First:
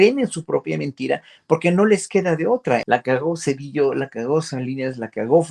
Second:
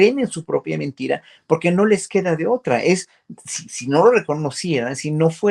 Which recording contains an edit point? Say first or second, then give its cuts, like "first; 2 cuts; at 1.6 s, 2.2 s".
first; 1 cut; at 2.8 s